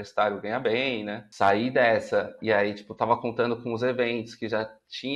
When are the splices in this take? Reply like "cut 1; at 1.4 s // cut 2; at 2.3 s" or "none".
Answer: cut 1; at 1.2 s